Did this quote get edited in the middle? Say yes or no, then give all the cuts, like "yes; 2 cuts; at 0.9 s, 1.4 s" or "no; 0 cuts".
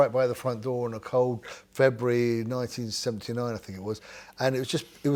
no; 0 cuts